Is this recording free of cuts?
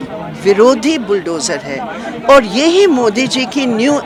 yes; 0 cuts

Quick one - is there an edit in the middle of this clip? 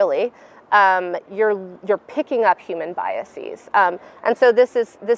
no; 0 cuts

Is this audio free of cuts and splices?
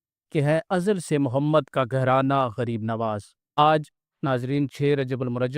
no; 1 cut; at 3.6 s

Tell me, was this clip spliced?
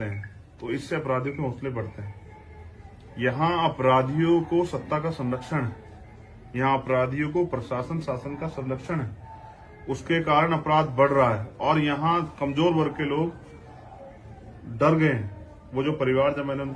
no; 0 cuts

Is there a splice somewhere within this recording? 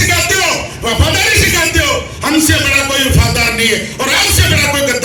no; 0 cuts

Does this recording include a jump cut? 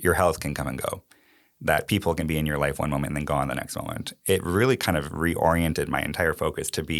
no; 0 cuts

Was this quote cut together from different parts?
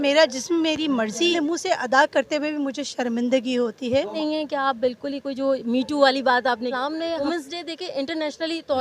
yes; 3 cuts; at 1.3 s, 4.2 s, 7.2 s

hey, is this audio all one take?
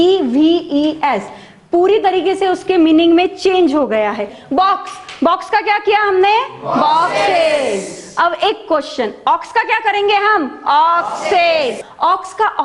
no; 2 cuts; at 4.3 s, 11.8 s

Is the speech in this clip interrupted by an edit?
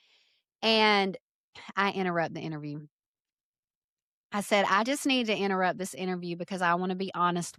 no; 0 cuts

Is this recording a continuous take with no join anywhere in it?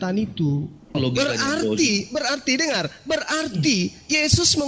no; 1 cut; at 1.0 s

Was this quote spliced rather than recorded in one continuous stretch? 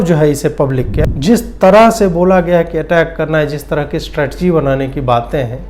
yes; 1 cut; at 0.9 s

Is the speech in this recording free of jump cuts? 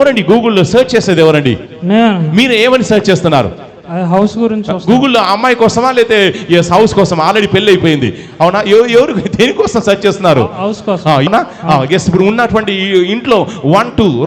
no; 1 cut; at 11.3 s

